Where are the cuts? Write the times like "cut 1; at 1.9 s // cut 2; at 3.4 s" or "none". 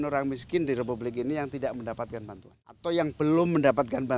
cut 1; at 2.8 s